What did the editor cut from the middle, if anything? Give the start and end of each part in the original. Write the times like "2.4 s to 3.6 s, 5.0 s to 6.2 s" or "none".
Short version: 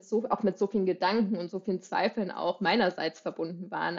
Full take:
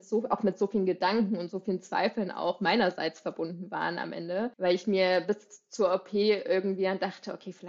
none